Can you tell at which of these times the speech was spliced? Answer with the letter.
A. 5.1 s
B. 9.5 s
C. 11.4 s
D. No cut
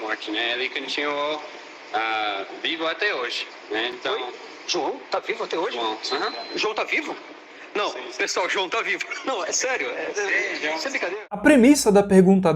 C